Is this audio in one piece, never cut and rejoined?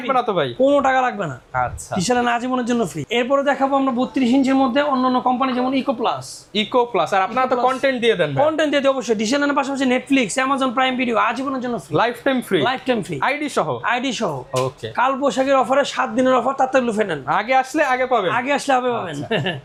yes; 0 cuts

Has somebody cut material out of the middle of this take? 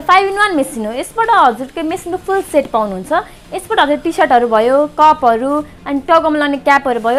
no; 0 cuts

